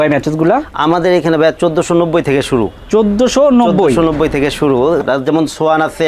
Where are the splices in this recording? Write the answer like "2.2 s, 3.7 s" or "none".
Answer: 5.0 s